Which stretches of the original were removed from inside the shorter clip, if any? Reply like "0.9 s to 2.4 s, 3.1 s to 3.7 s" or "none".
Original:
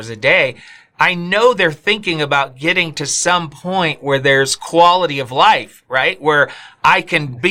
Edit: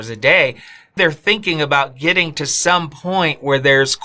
1.0 s to 1.6 s